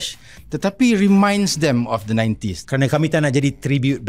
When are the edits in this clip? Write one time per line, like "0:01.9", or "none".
0:02.5